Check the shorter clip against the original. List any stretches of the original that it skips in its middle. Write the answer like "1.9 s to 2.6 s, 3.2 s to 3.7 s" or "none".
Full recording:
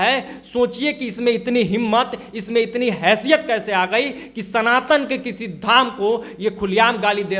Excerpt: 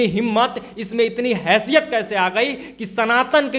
none